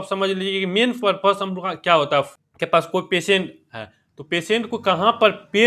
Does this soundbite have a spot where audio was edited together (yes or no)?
yes